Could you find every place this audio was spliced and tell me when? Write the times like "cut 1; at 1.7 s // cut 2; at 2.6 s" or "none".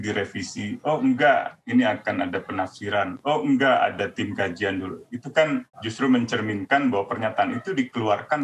none